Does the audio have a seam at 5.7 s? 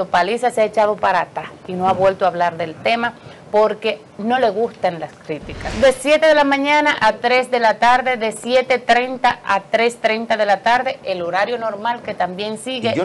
yes; 1 cut; at 5.7 s

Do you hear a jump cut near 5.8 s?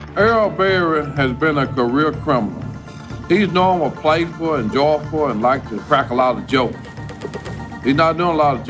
yes; 1 cut; at 5.8 s

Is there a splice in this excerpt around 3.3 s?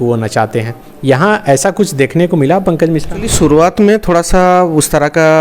yes; 1 cut; at 3.3 s

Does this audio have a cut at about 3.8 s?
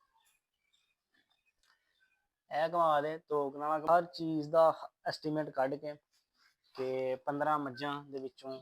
yes; 1 cut; at 3.8 s

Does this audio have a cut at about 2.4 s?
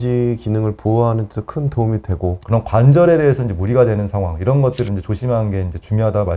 yes; 1 cut; at 2.4 s

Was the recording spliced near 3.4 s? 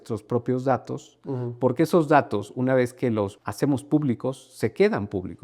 yes; 1 cut; at 3.4 s

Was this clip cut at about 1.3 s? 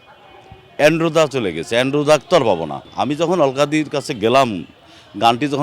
no; 1 cut; at 2.9 s

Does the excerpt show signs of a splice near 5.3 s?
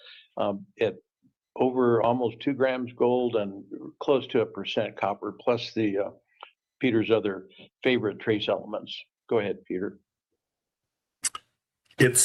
no; 0 cuts

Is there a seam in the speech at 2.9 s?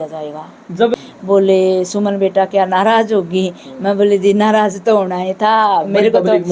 no; 1 cut; at 1.0 s

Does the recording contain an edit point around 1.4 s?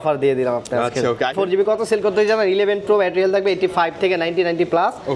yes; 1 cut; at 1.4 s

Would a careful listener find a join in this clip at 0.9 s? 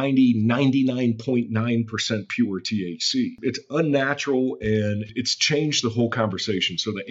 no; 2 cuts; at 3.4 s, 5.1 s

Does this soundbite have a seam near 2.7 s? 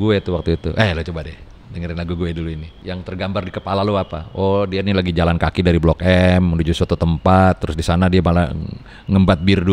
yes; 1 cut; at 2.7 s

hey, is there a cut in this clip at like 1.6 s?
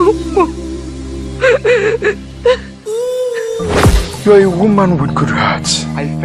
yes; 1 cut; at 1.6 s

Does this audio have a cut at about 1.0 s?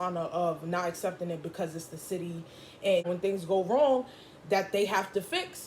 no; 1 cut; at 3.1 s

